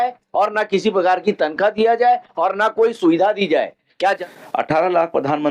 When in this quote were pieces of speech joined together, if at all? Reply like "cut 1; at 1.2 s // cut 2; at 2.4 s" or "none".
cut 1; at 3.9 s